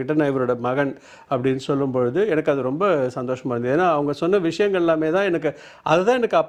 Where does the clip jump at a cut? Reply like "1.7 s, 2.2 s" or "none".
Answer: none